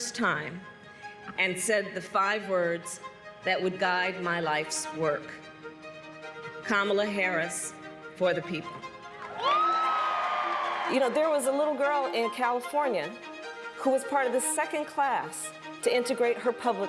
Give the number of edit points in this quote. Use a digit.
1